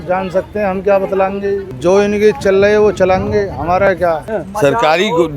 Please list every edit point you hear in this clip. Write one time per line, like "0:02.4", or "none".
0:01.7
0:04.2